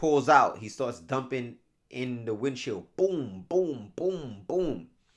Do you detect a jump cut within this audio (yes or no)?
no